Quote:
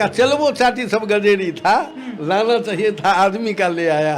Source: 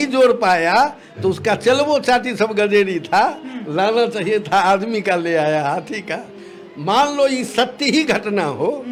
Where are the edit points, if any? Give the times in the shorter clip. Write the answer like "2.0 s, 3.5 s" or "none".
none